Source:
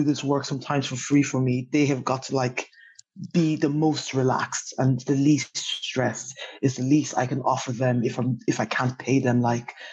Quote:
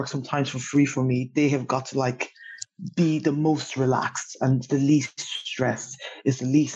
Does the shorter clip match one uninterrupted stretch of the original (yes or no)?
yes